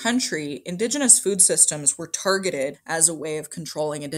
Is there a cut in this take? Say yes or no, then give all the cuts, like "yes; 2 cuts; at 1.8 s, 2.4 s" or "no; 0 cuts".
yes; 1 cut; at 2.8 s